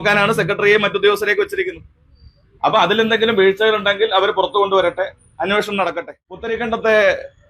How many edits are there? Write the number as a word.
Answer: one